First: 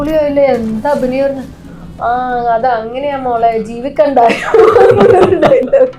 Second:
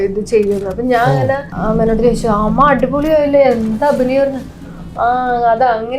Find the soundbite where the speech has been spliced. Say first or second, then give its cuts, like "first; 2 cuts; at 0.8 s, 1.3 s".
second; 1 cut; at 1.5 s